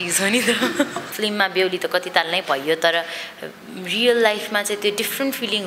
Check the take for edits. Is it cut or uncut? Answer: cut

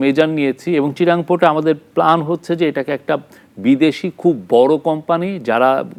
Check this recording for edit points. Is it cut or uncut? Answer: uncut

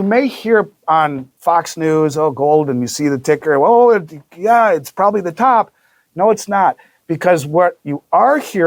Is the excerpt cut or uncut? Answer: uncut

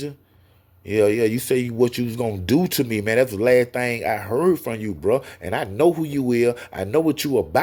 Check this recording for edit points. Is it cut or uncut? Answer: uncut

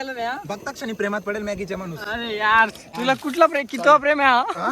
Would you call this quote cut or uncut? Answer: cut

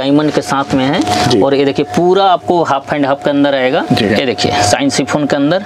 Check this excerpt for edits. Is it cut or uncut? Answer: cut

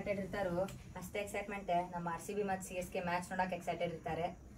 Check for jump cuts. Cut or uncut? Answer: uncut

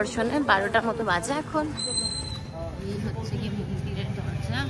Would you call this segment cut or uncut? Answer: uncut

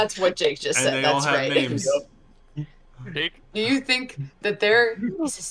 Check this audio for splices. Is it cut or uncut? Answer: uncut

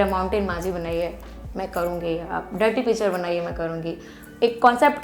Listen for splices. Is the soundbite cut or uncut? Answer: uncut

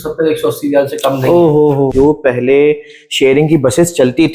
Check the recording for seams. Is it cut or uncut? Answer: cut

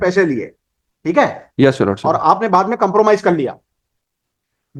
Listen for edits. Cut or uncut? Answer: uncut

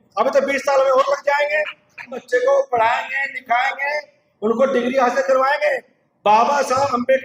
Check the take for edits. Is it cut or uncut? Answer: cut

